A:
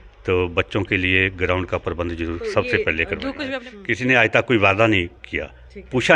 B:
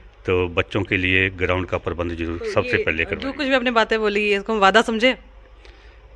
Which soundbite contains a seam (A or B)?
A